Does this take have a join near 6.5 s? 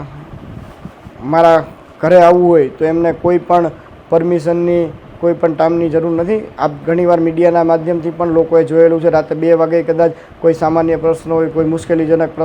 no; 0 cuts

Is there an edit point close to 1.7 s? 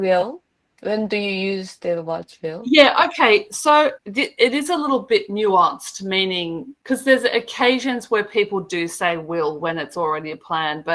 no; 0 cuts

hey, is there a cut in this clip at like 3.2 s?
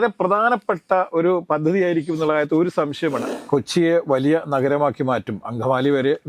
yes; 1 cut; at 3.2 s

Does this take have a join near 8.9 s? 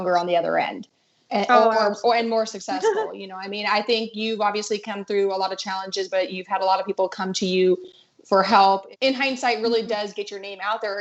yes; 1 cut; at 8.9 s

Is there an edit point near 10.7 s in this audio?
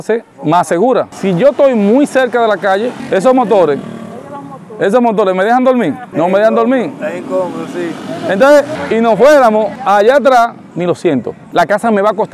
yes; 5 cuts; at 1.1 s, 3.0 s, 6.1 s, 8.7 s, 10.7 s

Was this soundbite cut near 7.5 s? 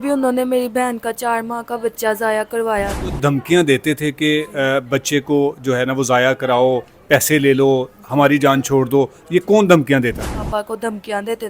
no; 2 cuts; at 3.1 s, 10.5 s

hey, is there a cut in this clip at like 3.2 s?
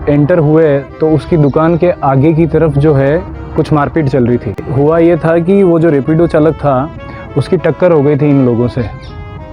no; 1 cut; at 4.7 s

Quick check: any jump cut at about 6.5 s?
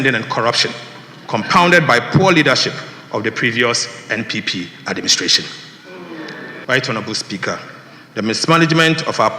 yes; 1 cut; at 6.5 s

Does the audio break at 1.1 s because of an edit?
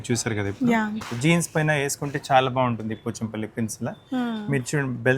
yes; 1 cut; at 1.1 s

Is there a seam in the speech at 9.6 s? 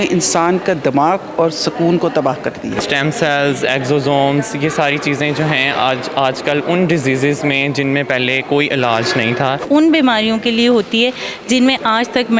yes; 2 cuts; at 2.8 s, 9.6 s

